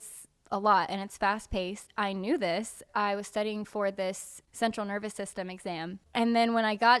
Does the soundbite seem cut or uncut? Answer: cut